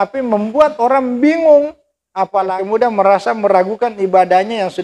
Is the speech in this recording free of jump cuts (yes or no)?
no